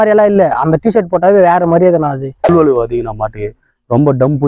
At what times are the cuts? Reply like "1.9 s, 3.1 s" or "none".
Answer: 2.5 s